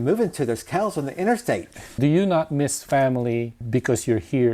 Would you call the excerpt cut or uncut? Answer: cut